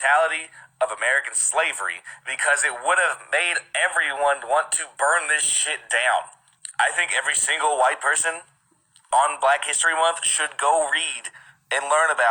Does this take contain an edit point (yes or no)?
no